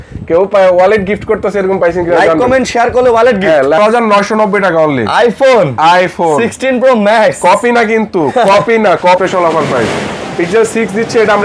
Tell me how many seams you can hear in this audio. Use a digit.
2